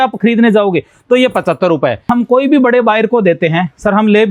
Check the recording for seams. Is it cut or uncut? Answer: cut